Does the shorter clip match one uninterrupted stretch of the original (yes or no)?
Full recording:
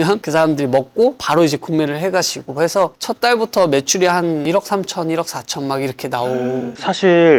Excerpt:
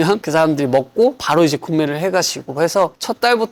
yes